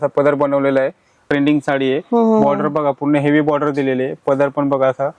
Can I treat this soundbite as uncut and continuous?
no; 1 cut; at 1.2 s

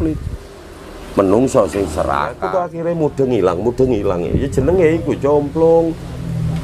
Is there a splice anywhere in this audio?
yes; 1 cut; at 2.5 s

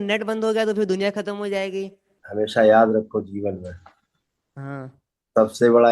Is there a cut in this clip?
yes; 1 cut; at 2.0 s

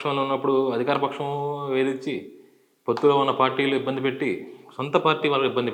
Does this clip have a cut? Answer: no; 0 cuts

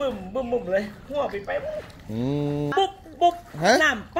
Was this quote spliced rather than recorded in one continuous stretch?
yes; 1 cut; at 2.7 s

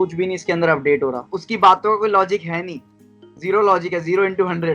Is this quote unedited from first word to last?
no; 1 cut; at 1.4 s

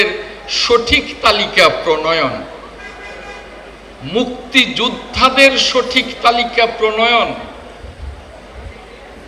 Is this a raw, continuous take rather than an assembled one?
yes; 0 cuts

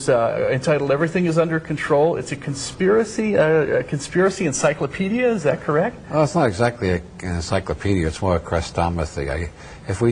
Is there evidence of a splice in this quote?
yes; 1 cut; at 3.1 s

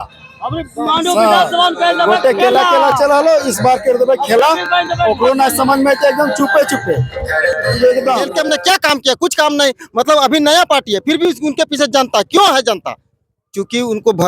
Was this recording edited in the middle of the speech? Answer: yes; 1 cut; at 8.3 s

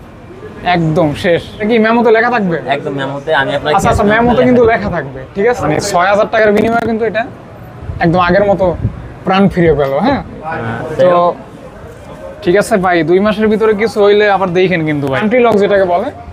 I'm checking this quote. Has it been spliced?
yes; 4 cuts; at 1.6 s, 5.6 s, 10.5 s, 15.1 s

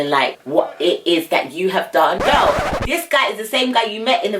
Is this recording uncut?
no; 1 cut; at 2.2 s

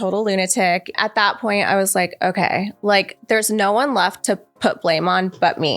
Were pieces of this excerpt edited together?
yes; 1 cut; at 0.9 s

